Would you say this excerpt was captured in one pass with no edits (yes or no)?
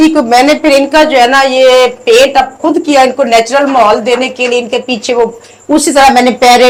yes